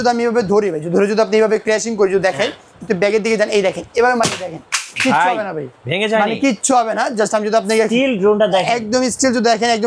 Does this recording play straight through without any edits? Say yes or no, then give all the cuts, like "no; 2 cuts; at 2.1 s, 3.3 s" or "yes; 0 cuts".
yes; 0 cuts